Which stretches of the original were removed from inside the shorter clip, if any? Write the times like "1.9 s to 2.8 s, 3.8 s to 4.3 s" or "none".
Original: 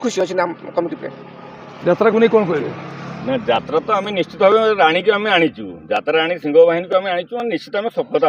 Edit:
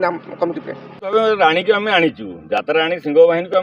1.5 s to 4.5 s

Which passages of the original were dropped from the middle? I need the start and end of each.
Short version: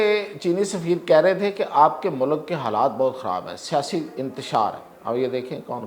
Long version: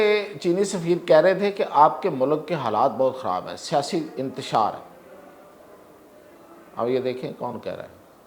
4.9 s to 6.6 s

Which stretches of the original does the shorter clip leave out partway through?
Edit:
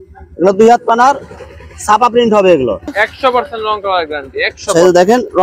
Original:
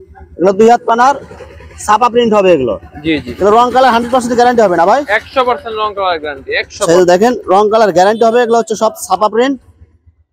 2.9 s to 5.1 s

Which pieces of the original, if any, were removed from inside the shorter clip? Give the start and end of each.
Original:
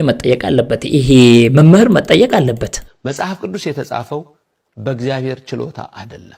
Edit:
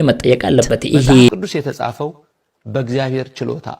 1.3 s to 3.4 s

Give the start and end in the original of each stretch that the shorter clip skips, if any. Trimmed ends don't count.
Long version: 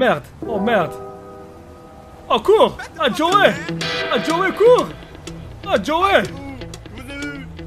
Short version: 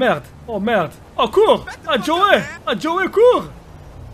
1.0 s to 2.1 s, 3.7 s to 4.0 s

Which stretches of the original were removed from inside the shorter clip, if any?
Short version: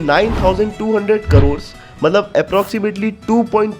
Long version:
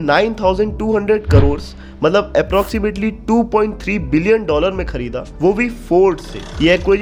none

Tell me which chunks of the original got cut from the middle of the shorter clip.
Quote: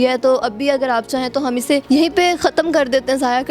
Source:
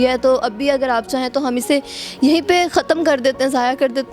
1.8 s to 2.2 s

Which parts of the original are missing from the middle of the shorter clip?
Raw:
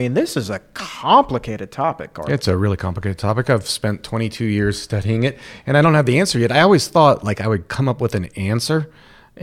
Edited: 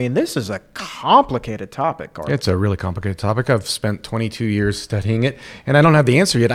none

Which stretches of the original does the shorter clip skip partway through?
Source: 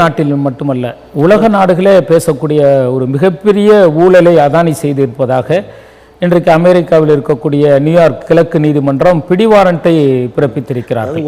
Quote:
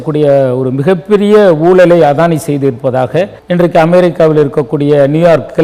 5.7 s to 6.1 s

